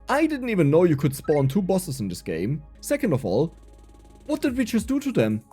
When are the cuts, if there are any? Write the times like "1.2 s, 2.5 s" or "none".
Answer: 2.7 s